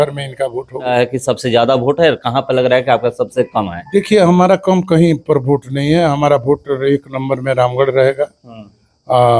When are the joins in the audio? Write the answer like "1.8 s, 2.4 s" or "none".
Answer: 0.9 s